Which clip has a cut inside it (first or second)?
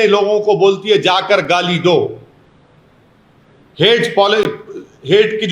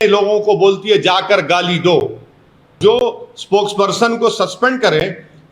second